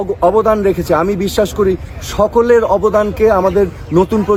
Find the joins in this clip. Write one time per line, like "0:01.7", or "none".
none